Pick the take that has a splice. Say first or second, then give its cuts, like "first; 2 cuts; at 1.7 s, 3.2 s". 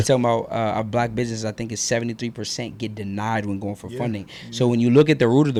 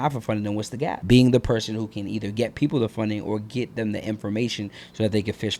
second; 1 cut; at 1.0 s